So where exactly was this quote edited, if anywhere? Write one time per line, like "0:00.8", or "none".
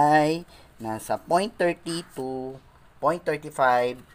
none